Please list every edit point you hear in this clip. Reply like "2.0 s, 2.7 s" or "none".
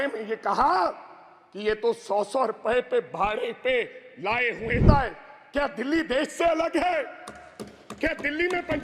4.8 s